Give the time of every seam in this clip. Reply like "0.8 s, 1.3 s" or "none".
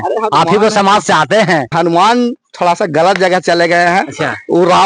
1.7 s

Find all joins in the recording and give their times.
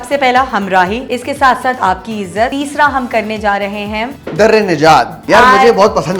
1.0 s, 2.5 s, 4.2 s, 5.2 s

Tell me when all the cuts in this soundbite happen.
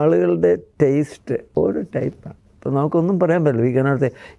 1.5 s

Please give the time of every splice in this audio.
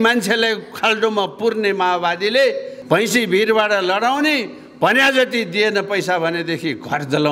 2.7 s

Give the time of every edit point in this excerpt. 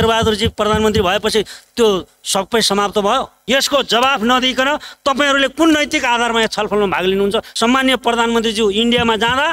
3.4 s, 7.5 s

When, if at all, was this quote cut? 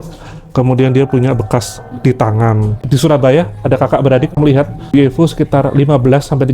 2.8 s, 4.3 s

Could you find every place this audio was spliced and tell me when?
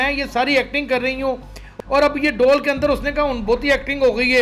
1.6 s

